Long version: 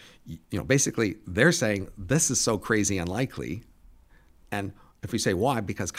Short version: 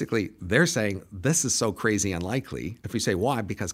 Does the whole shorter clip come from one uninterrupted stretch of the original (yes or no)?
no